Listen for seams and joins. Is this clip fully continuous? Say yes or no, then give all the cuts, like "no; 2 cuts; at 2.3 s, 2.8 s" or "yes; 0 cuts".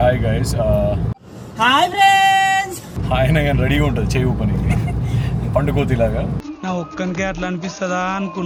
yes; 0 cuts